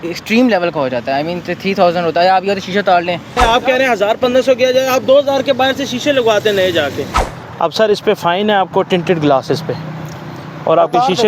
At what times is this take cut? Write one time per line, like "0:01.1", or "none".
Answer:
0:03.4
0:07.1